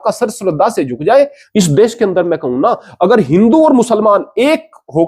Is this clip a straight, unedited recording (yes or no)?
no